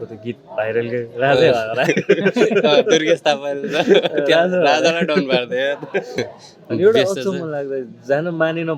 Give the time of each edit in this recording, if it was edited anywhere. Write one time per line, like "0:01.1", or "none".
0:06.2